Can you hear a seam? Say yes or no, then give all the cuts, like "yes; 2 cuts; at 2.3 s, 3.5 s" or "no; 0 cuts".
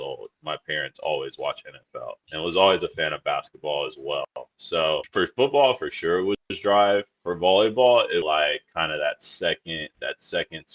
no; 0 cuts